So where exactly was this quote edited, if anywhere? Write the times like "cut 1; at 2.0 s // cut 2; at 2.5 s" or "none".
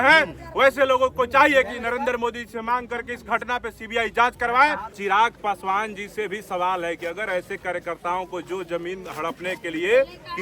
cut 1; at 5.0 s